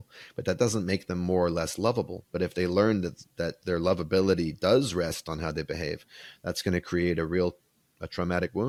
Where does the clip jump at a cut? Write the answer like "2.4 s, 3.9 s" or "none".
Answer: none